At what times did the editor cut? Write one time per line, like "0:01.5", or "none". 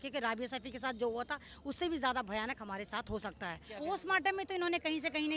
0:03.7